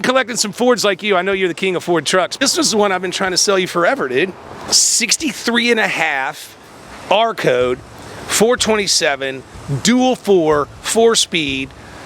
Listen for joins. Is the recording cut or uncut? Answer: cut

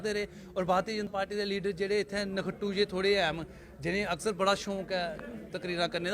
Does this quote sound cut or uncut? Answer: cut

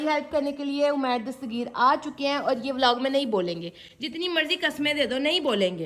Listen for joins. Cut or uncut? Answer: uncut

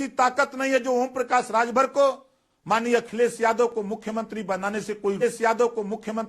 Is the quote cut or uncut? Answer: cut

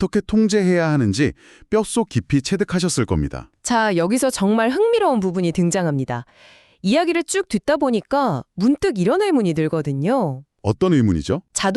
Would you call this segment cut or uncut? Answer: uncut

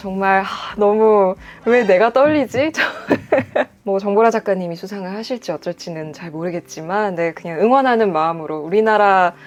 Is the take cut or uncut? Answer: uncut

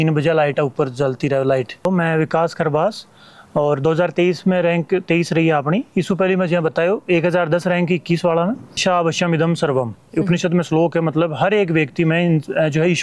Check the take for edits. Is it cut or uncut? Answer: cut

